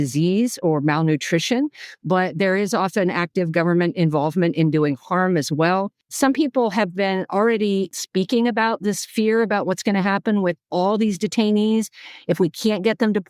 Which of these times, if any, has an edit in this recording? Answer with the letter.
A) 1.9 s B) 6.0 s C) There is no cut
B